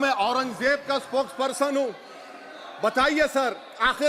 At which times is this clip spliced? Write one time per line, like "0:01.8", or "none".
none